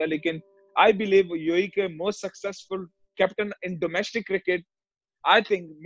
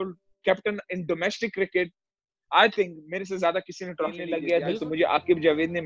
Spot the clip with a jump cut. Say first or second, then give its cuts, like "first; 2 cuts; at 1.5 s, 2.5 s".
second; 1 cut; at 4.3 s